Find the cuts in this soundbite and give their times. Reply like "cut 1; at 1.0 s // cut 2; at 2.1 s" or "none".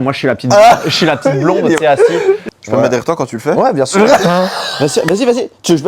cut 1; at 2.4 s